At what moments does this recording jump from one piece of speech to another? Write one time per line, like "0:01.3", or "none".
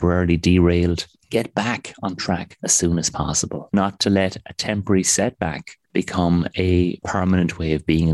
0:03.7
0:07.0

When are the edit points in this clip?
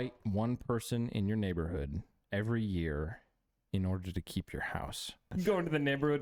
0:05.3

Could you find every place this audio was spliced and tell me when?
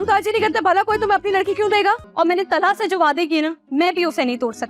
0:02.1

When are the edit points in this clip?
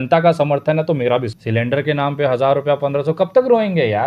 0:01.3

